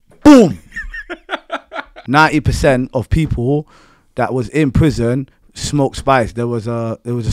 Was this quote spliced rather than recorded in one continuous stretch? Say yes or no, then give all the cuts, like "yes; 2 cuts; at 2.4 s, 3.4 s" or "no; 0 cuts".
yes; 1 cut; at 1.9 s